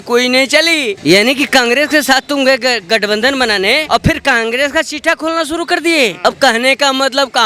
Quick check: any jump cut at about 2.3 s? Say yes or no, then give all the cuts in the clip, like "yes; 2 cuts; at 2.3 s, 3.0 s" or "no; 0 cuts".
no; 3 cuts; at 0.9 s, 3.8 s, 6.2 s